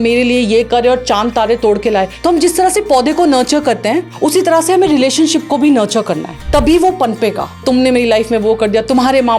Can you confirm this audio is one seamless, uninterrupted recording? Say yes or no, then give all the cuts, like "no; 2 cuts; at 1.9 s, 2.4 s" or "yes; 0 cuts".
no; 3 cuts; at 2.1 s, 4.1 s, 7.6 s